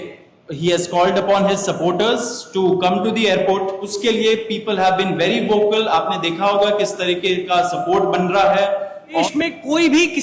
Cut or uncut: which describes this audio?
cut